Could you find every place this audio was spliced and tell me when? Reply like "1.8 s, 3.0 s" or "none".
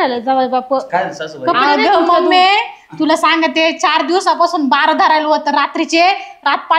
none